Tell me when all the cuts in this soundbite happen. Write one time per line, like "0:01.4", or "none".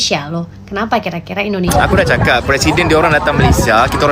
0:01.7